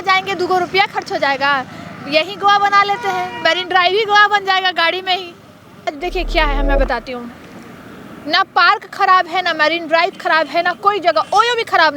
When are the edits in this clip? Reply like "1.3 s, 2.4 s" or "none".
5.9 s